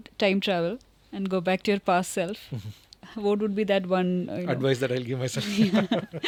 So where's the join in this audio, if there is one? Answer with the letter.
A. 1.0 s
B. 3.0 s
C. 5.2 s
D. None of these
D